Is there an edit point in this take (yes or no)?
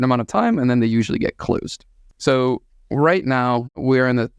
no